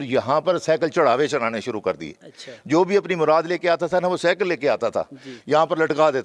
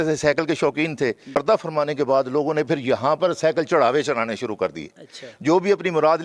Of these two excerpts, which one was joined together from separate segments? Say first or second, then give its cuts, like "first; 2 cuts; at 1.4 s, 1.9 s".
second; 1 cut; at 1.4 s